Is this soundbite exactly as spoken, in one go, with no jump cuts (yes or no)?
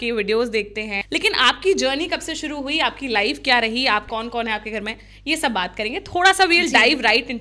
no